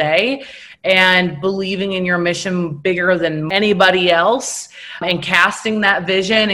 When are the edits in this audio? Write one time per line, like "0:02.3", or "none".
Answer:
0:03.4
0:05.0